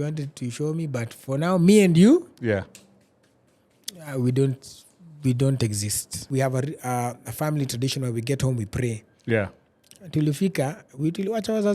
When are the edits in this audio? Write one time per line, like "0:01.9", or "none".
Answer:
0:06.2